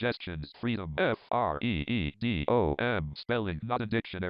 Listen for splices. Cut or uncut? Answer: cut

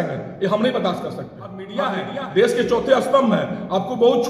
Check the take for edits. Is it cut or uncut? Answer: cut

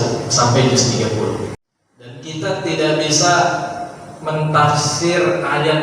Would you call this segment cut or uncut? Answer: cut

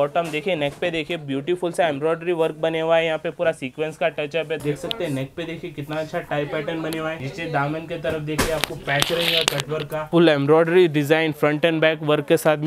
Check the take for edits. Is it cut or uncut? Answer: cut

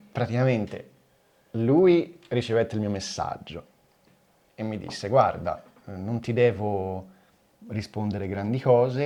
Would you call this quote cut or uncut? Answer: uncut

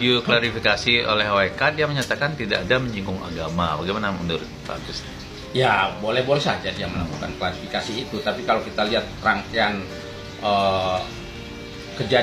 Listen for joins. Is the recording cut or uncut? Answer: uncut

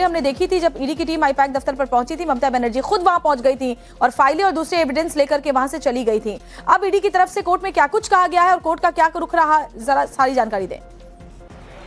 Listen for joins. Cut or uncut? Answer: uncut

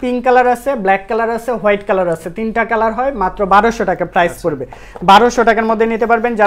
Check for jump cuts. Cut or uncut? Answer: uncut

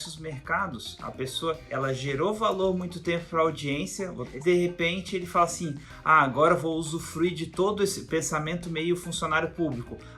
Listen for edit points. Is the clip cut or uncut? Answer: cut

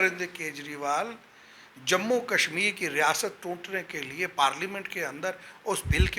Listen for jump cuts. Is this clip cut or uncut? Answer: uncut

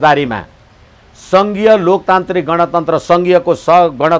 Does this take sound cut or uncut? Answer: uncut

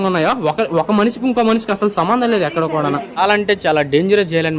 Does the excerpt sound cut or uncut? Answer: cut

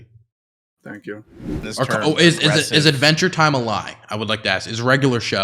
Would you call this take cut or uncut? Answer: cut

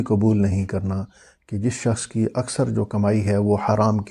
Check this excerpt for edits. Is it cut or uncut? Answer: uncut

